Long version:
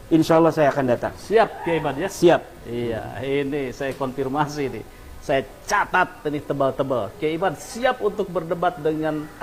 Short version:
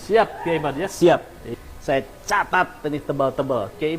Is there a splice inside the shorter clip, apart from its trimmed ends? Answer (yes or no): yes